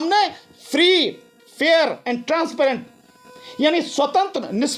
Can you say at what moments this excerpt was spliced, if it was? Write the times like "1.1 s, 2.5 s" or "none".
none